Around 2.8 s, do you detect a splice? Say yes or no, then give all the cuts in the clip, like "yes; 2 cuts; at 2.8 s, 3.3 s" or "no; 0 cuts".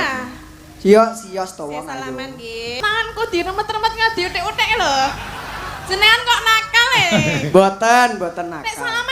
yes; 1 cut; at 2.8 s